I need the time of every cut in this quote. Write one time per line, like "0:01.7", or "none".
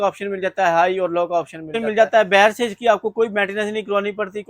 0:01.8